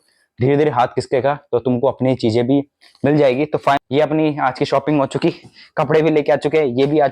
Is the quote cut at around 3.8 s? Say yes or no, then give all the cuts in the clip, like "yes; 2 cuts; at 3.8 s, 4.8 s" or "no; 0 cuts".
yes; 1 cut; at 3.8 s